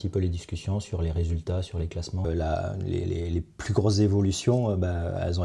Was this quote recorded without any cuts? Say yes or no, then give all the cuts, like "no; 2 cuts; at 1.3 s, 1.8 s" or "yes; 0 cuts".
no; 1 cut; at 2.2 s